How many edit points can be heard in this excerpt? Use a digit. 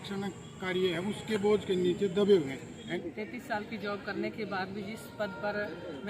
1